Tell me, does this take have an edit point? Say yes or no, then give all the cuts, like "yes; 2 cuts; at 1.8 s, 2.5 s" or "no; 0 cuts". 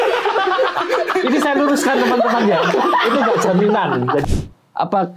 yes; 1 cut; at 4.2 s